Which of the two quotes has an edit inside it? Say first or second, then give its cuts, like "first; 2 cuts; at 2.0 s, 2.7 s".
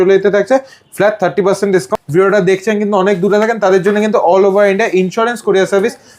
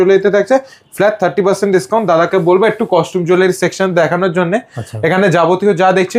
first; 1 cut; at 1.9 s